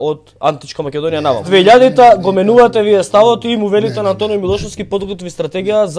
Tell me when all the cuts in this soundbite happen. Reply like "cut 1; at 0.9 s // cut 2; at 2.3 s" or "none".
cut 1; at 1.4 s